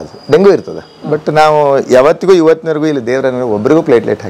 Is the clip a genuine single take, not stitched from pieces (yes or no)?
yes